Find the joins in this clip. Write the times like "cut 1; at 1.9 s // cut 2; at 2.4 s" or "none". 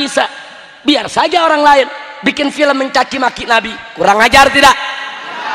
none

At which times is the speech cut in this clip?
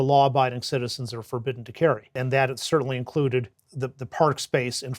cut 1; at 2.2 s // cut 2; at 3.6 s

